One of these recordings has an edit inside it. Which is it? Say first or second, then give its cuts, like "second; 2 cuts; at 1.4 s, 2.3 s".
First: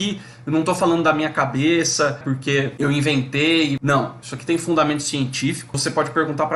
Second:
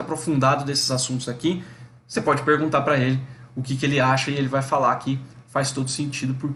first; 3 cuts; at 2.3 s, 3.8 s, 5.8 s